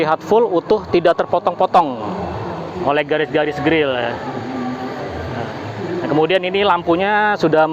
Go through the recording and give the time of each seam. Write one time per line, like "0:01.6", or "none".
none